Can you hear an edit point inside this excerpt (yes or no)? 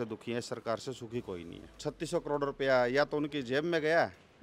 yes